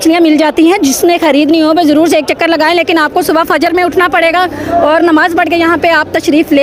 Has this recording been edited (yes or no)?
no